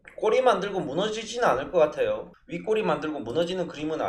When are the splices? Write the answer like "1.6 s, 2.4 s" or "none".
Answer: none